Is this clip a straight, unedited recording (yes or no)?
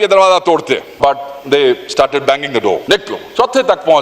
no